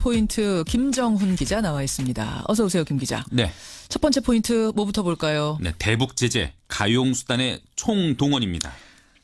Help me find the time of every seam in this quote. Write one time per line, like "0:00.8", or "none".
none